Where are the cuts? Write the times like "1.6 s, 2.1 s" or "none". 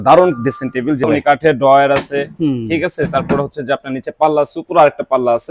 1.1 s